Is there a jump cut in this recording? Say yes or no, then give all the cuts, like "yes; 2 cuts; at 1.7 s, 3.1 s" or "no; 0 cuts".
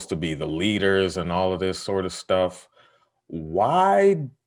no; 0 cuts